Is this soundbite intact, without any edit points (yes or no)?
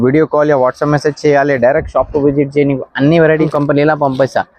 no